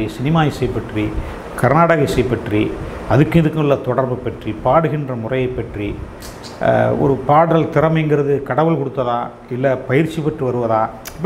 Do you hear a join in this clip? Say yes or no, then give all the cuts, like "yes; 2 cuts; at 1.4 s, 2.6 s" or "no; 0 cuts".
no; 0 cuts